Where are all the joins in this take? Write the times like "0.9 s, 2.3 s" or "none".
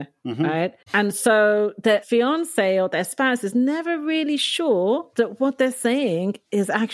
0.8 s, 2.0 s, 5.1 s